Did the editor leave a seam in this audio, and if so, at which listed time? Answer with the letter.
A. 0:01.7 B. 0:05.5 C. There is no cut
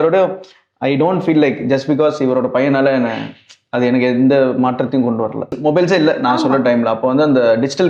B